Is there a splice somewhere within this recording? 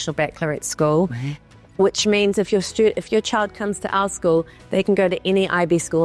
no; 0 cuts

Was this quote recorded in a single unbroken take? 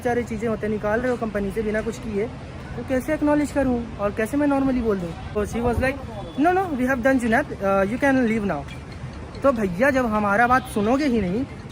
no; 1 cut; at 5.4 s

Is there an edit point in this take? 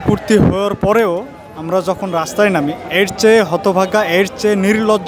no; 0 cuts

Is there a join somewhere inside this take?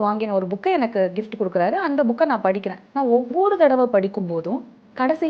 yes; 1 cut; at 2.8 s

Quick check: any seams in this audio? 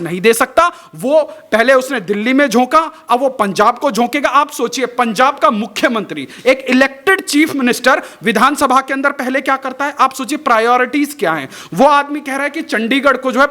no; 0 cuts

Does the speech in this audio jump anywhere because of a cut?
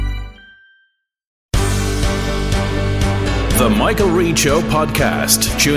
yes; 1 cut; at 1.5 s

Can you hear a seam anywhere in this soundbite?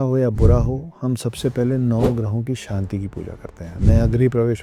no; 0 cuts

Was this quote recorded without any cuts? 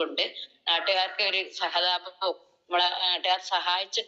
yes; 0 cuts

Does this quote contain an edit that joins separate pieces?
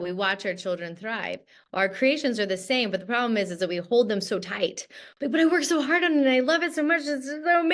no; 0 cuts

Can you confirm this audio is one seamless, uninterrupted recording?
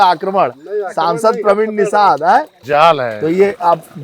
no; 1 cut; at 2.6 s

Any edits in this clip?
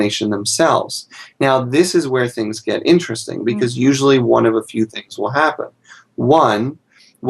yes; 1 cut; at 3.7 s

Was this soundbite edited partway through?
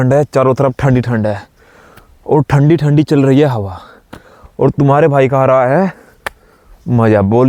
no; 0 cuts

